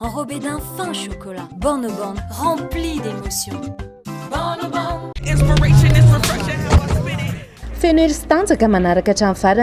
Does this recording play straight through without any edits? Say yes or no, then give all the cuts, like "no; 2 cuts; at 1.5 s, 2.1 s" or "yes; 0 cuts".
no; 1 cut; at 5.1 s